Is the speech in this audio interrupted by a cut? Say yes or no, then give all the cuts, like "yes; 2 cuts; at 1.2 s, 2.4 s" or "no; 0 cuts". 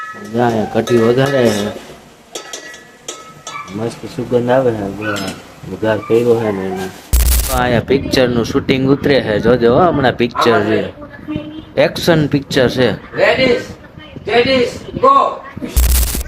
yes; 1 cut; at 7.4 s